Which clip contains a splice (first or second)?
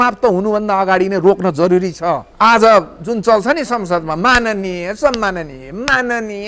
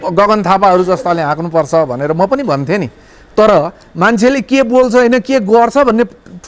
first